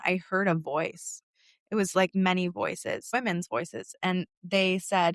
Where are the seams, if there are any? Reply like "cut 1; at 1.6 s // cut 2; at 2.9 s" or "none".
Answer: cut 1; at 1.1 s // cut 2; at 3.0 s

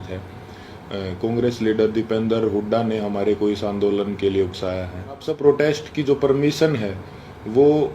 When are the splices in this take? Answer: cut 1; at 5.3 s

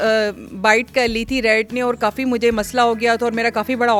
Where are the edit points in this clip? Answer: none

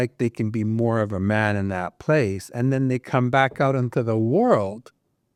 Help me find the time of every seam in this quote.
none

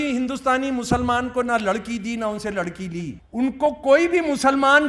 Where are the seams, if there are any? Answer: cut 1; at 3.2 s

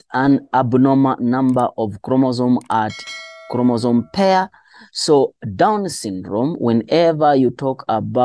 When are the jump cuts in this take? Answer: cut 1; at 4.1 s

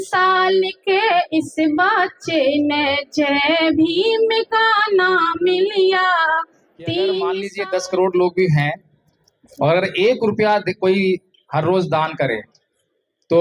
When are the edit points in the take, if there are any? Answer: cut 1; at 7.5 s

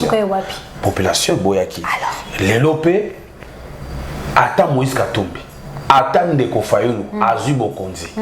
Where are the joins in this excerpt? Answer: none

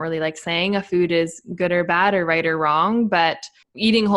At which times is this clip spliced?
none

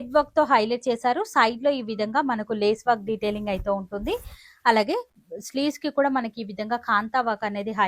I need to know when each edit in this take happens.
none

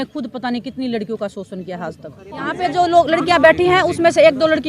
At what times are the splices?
cut 1; at 2.6 s

